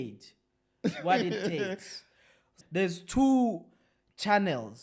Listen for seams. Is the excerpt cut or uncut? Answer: cut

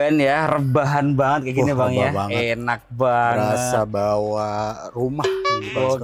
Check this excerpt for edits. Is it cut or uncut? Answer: uncut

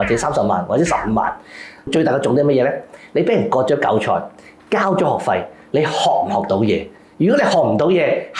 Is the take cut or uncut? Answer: cut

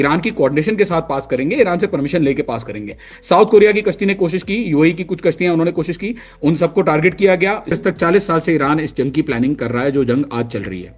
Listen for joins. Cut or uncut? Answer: cut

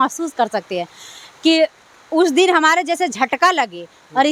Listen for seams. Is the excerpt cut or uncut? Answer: uncut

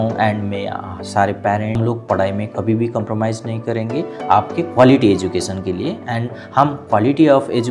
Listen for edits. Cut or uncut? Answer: cut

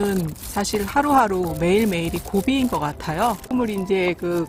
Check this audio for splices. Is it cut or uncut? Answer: cut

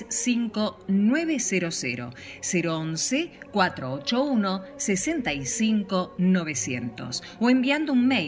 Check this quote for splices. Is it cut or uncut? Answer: uncut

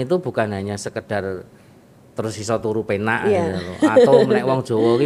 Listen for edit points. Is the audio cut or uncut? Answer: uncut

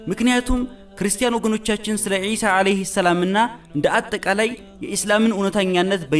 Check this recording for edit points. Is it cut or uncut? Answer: uncut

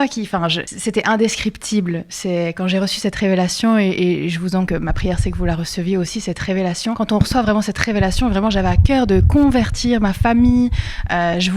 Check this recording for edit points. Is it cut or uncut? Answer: uncut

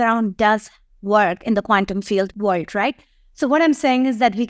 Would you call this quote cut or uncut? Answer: cut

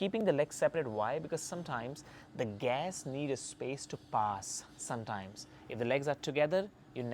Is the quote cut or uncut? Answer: uncut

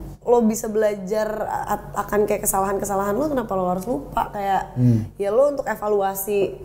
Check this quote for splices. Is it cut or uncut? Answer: uncut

